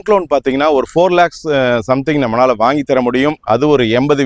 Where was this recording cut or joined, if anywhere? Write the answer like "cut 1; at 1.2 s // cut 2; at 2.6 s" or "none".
none